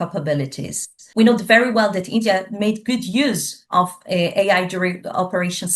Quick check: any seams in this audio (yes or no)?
yes